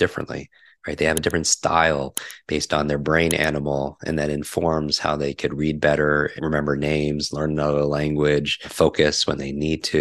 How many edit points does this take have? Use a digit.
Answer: 2